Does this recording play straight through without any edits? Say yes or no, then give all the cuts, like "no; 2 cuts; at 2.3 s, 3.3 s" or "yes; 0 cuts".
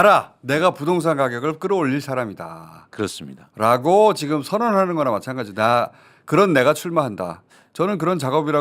yes; 0 cuts